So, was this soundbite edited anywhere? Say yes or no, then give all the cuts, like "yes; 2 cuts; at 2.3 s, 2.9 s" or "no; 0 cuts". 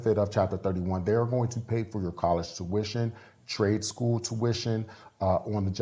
no; 0 cuts